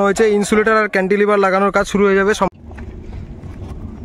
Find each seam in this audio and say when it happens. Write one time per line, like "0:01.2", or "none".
0:02.5